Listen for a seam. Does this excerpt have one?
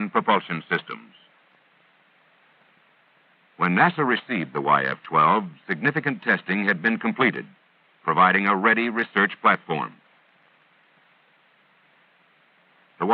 yes; 1 cut; at 9.1 s

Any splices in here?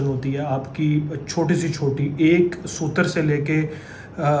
no; 0 cuts

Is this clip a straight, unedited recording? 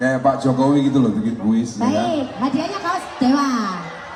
yes; 0 cuts

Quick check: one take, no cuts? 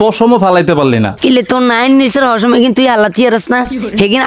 no; 1 cut; at 1.1 s

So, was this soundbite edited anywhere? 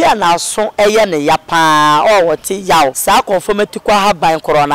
yes; 1 cut; at 3.0 s

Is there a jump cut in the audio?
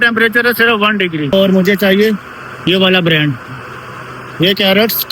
yes; 1 cut; at 1.3 s

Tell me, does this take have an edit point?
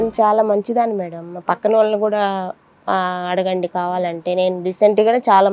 no; 0 cuts

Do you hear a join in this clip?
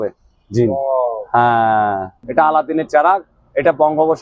yes; 1 cut; at 2.1 s

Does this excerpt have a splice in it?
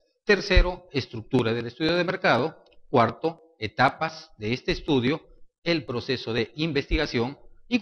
yes; 1 cut; at 2.3 s

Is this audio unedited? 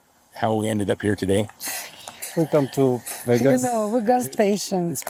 yes; 0 cuts

